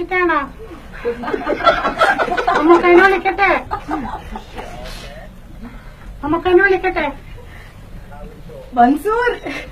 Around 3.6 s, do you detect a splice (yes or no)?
yes